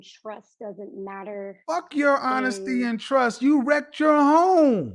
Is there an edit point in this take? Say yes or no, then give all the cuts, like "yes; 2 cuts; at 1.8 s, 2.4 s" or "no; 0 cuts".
no; 0 cuts